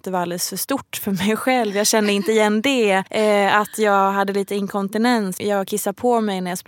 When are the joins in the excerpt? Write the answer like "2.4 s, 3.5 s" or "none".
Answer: 3.1 s, 5.3 s